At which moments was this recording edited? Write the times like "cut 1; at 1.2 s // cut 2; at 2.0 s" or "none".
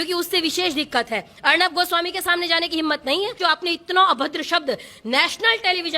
cut 1; at 3.4 s